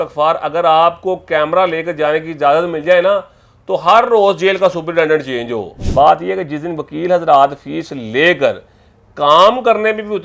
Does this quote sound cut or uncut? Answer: cut